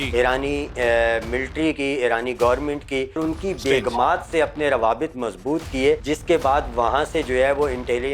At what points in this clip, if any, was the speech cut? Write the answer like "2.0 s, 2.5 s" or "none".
3.2 s, 6.0 s